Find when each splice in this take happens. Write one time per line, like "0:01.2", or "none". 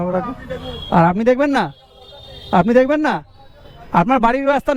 none